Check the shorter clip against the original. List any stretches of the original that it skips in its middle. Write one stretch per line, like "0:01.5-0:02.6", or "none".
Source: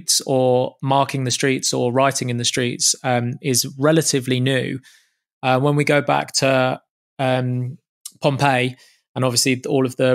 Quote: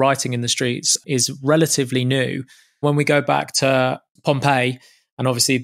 0:02.9-0:03.3
0:05.2-0:05.6
0:06.9-0:08.1